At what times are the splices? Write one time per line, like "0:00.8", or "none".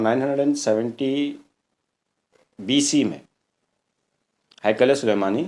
none